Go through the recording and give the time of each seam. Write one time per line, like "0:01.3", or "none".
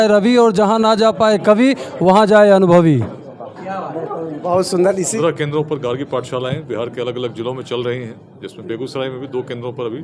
0:05.0